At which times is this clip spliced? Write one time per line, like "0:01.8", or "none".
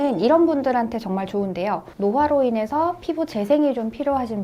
0:01.9